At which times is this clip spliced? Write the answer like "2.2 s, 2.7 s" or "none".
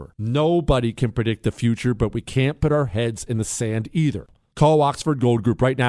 4.2 s